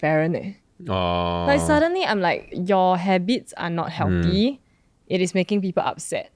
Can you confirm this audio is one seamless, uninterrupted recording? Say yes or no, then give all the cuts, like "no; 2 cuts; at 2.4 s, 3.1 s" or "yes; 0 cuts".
yes; 0 cuts